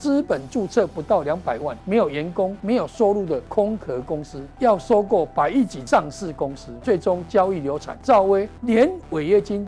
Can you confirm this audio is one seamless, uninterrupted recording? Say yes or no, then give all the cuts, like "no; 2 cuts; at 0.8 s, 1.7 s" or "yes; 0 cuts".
no; 8 cuts; at 1.7 s, 2.6 s, 3.5 s, 4.4 s, 5.8 s, 6.7 s, 7.9 s, 8.5 s